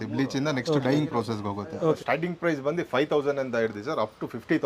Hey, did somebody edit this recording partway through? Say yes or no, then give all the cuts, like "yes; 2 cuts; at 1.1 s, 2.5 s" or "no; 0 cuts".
yes; 1 cut; at 2.0 s